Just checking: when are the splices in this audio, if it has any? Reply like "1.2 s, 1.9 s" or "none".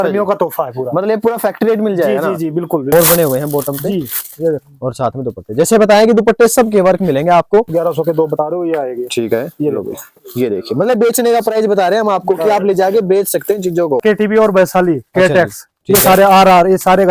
2.9 s, 7.7 s, 14.0 s